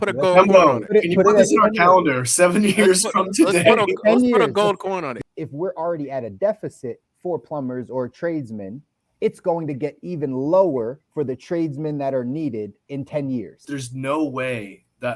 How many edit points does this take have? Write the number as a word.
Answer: two